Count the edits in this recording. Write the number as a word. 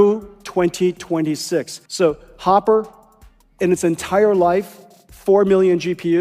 one